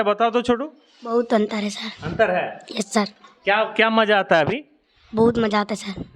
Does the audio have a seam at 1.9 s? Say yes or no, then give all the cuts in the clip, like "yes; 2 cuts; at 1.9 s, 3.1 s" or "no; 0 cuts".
no; 0 cuts